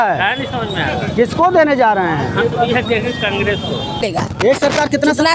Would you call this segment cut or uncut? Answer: cut